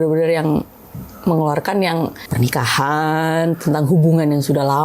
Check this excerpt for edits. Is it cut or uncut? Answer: cut